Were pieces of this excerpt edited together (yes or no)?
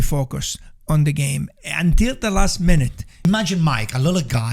yes